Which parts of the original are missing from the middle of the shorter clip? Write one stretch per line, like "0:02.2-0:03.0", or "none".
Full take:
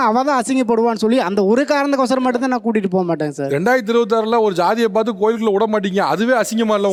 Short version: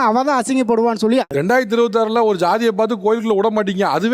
0:01.3-0:03.4